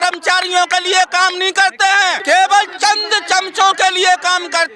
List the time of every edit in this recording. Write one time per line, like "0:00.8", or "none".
0:02.2